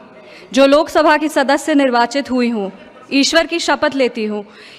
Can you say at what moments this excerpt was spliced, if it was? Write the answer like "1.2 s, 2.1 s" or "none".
none